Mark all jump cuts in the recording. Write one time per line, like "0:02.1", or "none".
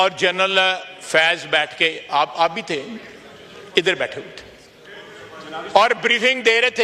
none